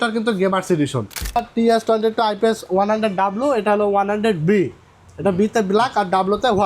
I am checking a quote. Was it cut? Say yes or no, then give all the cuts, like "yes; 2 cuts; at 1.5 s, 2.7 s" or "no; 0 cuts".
yes; 1 cut; at 1.4 s